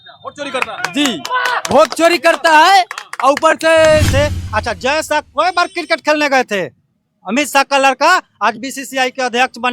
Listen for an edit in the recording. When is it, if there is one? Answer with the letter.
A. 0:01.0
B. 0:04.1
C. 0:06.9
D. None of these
B